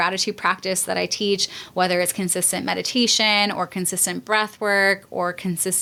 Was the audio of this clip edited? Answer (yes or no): no